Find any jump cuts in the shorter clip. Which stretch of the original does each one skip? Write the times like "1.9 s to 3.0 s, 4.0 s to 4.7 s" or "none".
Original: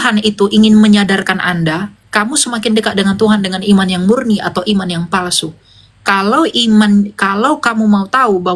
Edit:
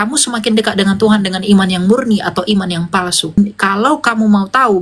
5.6 s to 7.0 s